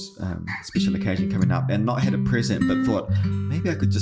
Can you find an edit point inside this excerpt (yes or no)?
no